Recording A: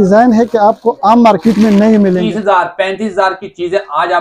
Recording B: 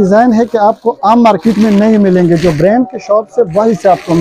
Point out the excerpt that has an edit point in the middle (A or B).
A